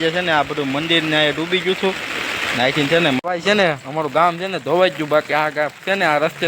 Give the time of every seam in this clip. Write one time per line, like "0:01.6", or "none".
0:03.2